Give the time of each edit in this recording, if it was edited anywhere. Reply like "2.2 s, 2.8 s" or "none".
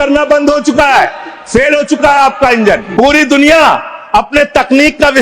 2.9 s